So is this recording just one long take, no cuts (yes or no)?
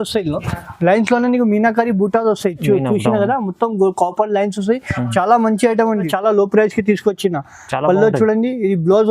no